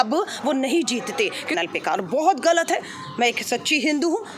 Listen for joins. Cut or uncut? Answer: cut